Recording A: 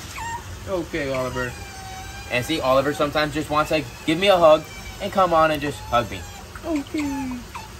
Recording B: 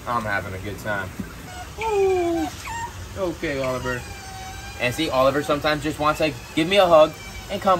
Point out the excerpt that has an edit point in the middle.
B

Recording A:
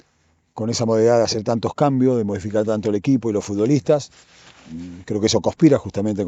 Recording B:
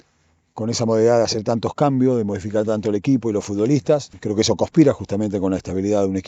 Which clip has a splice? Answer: B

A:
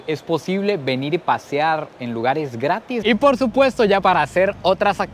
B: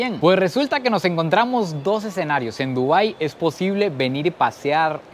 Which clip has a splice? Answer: A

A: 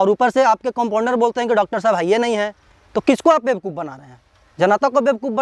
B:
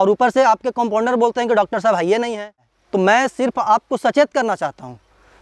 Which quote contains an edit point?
B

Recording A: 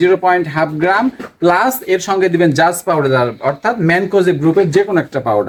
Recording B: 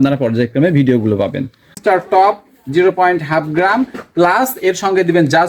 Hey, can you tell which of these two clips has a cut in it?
B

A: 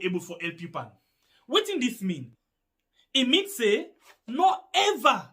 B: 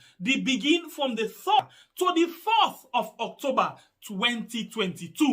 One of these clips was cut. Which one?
B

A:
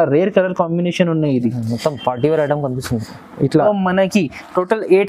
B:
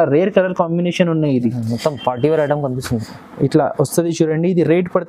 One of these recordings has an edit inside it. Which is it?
A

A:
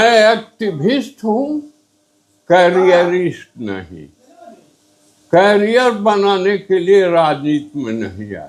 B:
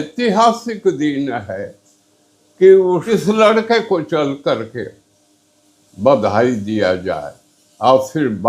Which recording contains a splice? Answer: B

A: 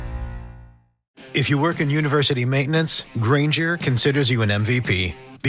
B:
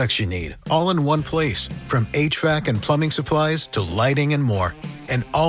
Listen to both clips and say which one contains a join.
A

